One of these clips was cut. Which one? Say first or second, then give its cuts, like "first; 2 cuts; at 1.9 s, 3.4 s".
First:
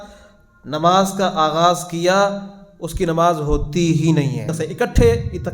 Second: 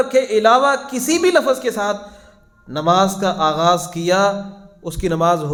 first; 1 cut; at 4.6 s